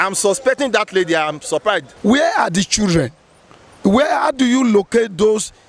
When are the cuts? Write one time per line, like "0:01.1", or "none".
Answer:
0:01.9